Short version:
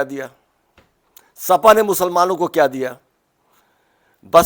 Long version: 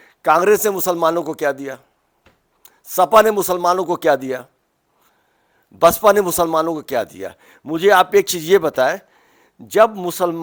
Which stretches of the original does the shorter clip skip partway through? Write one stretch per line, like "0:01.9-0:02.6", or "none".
none